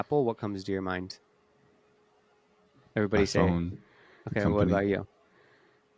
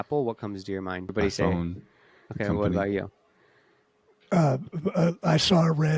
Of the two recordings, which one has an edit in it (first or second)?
second